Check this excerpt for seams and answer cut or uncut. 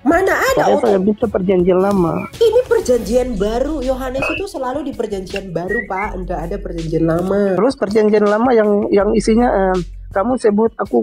cut